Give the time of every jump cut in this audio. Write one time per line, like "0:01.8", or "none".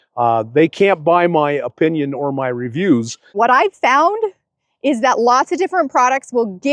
0:03.3